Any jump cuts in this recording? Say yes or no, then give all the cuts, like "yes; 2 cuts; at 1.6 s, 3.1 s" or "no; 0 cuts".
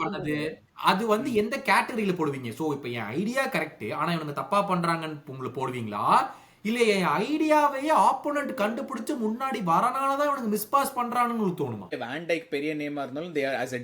yes; 1 cut; at 12.0 s